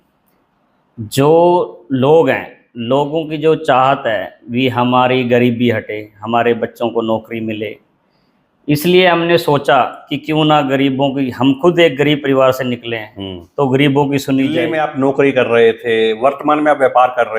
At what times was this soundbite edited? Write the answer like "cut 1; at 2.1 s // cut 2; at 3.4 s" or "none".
cut 1; at 14.7 s